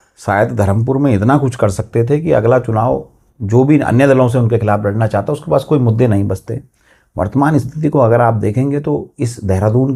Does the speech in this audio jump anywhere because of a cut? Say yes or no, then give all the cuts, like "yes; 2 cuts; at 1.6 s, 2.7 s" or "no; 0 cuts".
no; 0 cuts